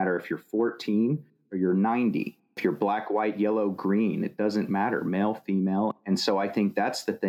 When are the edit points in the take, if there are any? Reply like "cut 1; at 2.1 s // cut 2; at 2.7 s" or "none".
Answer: cut 1; at 2.4 s